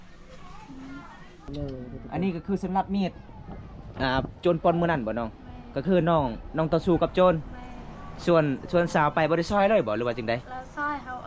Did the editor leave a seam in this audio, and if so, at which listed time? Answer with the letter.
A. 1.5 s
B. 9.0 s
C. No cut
A